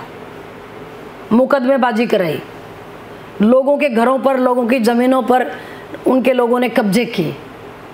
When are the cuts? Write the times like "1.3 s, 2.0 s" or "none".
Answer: none